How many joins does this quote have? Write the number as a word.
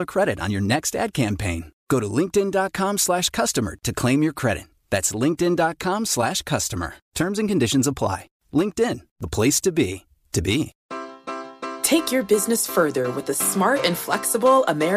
one